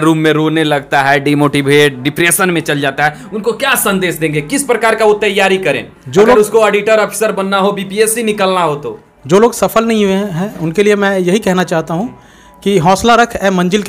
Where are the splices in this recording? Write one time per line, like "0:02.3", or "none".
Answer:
none